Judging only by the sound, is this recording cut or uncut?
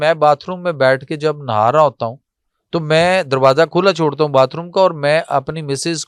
uncut